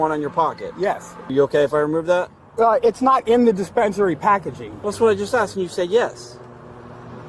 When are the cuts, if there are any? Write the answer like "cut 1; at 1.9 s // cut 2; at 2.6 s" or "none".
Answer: cut 1; at 1.3 s